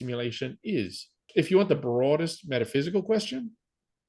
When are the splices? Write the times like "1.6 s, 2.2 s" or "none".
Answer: 1.3 s